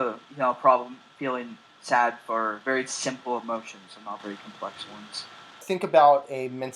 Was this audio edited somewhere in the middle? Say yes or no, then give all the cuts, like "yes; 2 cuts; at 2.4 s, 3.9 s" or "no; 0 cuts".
yes; 2 cuts; at 2.6 s, 5.6 s